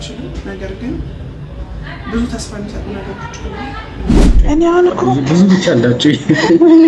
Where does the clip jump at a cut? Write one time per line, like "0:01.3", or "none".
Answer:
0:04.4